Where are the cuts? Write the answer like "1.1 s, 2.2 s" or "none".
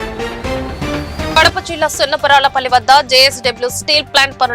1.3 s